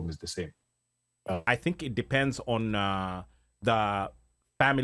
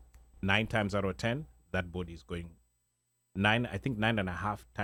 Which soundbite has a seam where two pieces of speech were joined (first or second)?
first